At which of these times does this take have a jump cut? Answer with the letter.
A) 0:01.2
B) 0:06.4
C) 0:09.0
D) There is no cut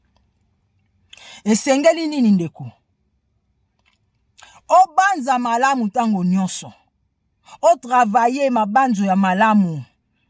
D